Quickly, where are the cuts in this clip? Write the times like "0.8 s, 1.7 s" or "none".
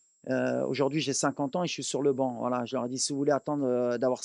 none